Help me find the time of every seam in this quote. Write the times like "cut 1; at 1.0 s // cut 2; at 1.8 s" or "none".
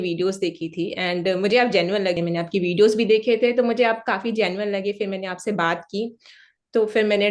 cut 1; at 2.2 s